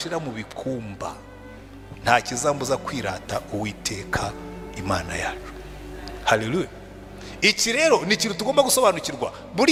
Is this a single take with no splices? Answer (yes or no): yes